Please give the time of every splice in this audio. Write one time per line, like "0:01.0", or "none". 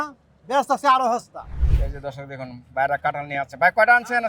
0:01.6